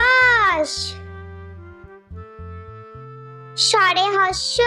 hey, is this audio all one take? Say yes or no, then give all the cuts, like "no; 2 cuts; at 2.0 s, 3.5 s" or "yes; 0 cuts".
no; 2 cuts; at 0.7 s, 3.3 s